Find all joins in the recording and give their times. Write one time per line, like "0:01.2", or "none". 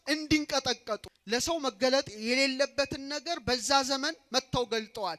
0:01.1